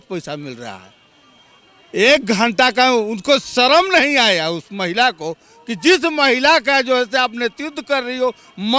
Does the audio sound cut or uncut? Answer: uncut